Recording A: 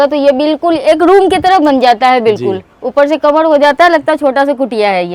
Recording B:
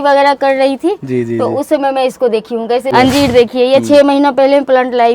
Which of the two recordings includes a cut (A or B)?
B